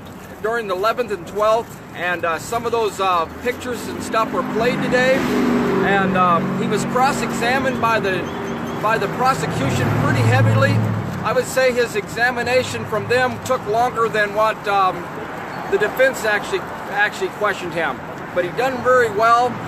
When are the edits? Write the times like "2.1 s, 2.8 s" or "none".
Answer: none